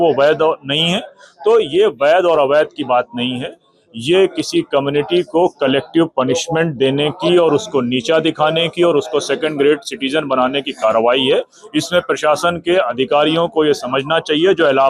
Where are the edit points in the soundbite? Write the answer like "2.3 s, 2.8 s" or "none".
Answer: none